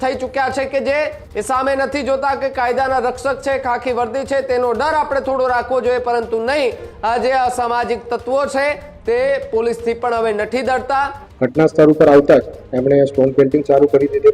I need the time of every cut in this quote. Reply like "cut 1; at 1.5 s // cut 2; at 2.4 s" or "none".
cut 1; at 1.3 s // cut 2; at 11.2 s